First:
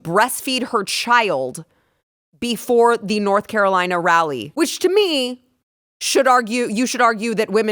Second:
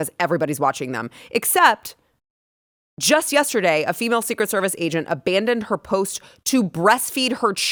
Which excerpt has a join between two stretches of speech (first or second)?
first